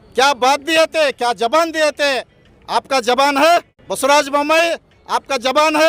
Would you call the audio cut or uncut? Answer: cut